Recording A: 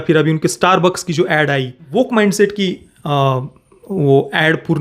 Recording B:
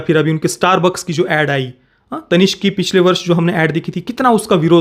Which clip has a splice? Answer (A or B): A